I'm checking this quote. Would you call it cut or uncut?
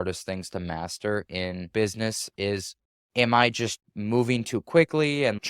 cut